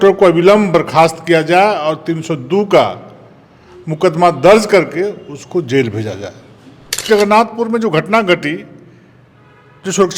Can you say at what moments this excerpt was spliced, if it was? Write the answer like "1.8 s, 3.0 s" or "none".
7.0 s